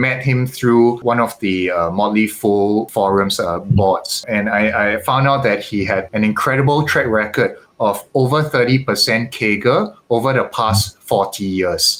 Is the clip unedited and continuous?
yes; 0 cuts

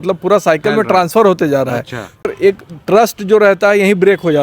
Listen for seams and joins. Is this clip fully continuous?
no; 1 cut; at 2.3 s

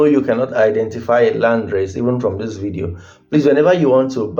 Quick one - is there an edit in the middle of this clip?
no; 0 cuts

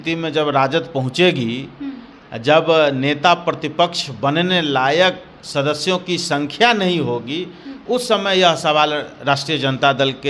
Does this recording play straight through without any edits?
yes; 0 cuts

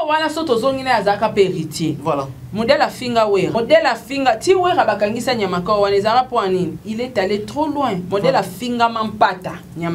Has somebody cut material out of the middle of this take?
yes; 3 cuts; at 2.0 s, 3.5 s, 6.8 s

